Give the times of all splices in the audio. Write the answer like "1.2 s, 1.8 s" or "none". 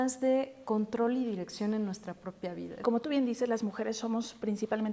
2.8 s